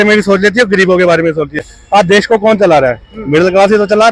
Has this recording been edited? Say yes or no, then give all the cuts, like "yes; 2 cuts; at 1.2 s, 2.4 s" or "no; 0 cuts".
yes; 1 cut; at 1.7 s